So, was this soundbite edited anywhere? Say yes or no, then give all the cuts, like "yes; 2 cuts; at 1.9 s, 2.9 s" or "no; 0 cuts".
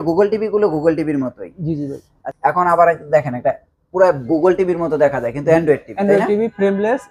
yes; 1 cut; at 2.2 s